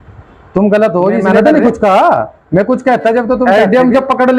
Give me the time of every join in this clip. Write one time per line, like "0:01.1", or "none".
0:01.3
0:03.4